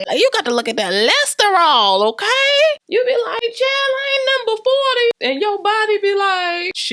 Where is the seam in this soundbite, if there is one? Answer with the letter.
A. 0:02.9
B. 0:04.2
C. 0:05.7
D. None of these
A